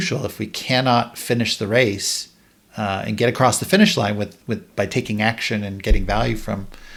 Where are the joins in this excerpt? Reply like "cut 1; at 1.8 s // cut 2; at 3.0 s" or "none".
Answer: none